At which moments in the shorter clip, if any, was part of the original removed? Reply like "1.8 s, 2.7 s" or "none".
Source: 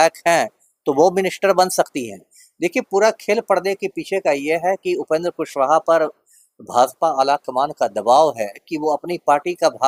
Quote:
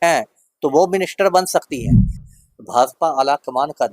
2.2 s